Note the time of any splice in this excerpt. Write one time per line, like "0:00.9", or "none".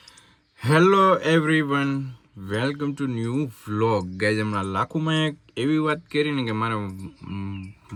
none